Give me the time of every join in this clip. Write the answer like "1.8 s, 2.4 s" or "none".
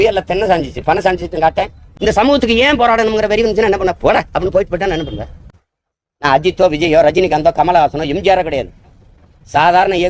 1.8 s, 5.6 s

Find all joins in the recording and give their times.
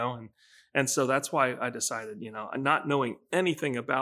none

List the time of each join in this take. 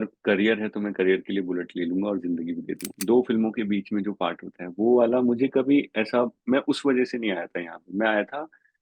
2.9 s

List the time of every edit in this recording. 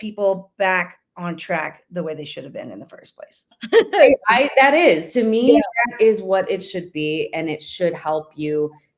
3.5 s

